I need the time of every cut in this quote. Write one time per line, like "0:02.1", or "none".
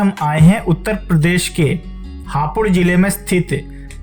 none